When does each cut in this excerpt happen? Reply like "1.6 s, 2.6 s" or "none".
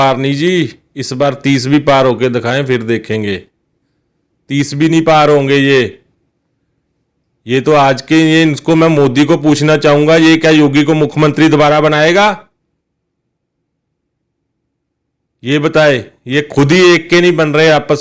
none